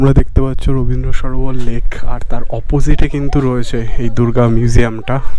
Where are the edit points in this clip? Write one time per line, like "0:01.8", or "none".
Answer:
none